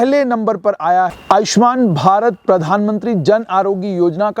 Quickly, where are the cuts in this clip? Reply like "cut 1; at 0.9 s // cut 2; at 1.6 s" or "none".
cut 1; at 1.2 s